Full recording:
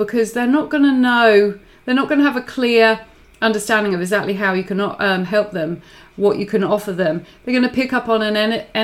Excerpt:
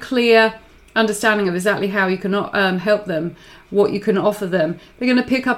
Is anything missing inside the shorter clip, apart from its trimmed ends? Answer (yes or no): no